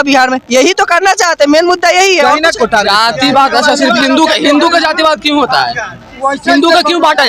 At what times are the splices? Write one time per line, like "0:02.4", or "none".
0:02.5